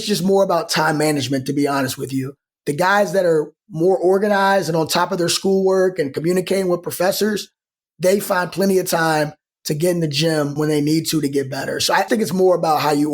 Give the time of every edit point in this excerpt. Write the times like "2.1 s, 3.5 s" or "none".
10.6 s, 12.1 s